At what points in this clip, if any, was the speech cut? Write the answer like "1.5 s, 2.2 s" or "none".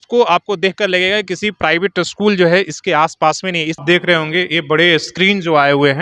3.8 s